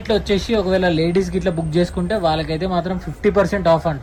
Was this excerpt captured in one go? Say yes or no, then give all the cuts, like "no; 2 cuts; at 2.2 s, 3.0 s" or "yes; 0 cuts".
yes; 0 cuts